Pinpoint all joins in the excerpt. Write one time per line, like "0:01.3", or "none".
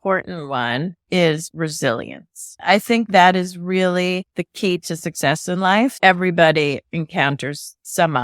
0:01.0
0:02.6
0:06.0